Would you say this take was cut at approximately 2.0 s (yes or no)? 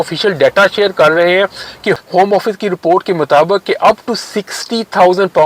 yes